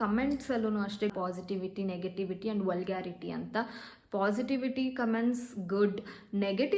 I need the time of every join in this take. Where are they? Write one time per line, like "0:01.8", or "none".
0:01.1